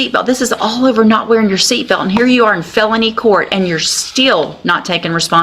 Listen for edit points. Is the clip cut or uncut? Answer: uncut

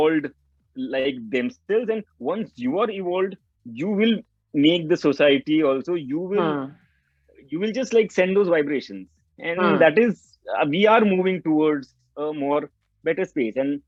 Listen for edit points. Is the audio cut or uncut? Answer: uncut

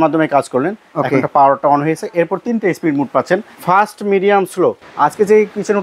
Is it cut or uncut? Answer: cut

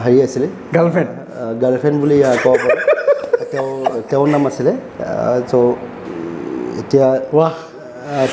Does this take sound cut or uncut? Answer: uncut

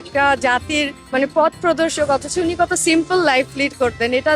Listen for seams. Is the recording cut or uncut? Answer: cut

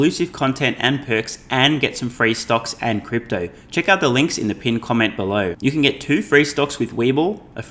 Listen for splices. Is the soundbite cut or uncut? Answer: uncut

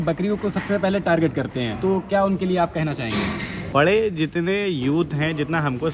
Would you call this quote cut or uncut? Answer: cut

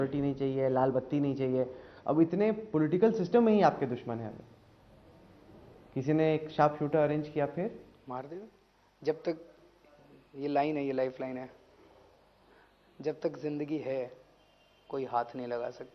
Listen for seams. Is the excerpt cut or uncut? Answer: uncut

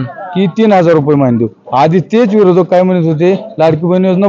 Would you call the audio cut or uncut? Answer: uncut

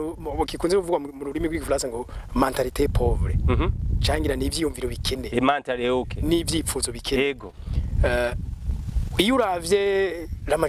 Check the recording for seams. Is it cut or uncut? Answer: uncut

